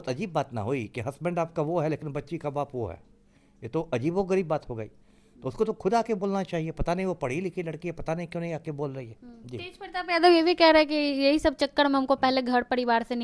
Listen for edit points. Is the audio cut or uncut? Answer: uncut